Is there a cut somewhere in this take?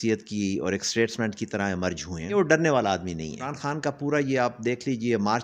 yes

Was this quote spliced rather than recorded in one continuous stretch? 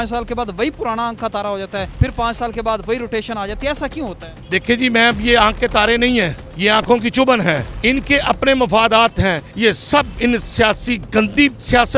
no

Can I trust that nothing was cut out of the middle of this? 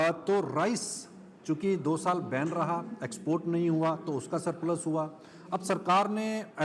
yes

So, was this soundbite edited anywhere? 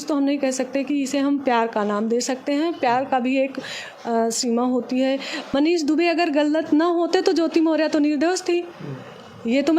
yes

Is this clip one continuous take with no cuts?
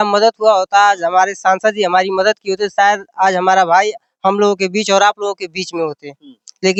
yes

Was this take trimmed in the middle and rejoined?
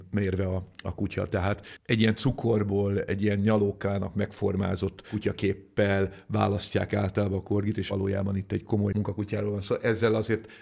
yes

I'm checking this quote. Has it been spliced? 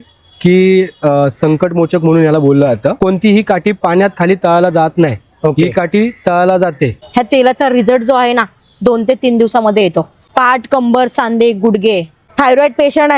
yes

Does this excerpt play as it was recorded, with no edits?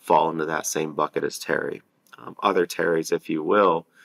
yes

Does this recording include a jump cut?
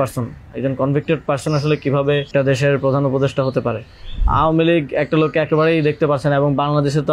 yes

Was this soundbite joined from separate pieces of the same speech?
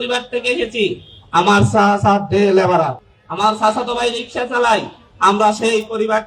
no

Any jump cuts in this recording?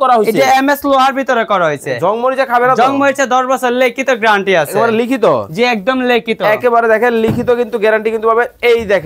no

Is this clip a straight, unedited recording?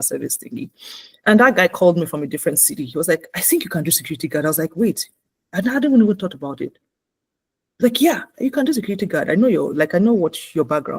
yes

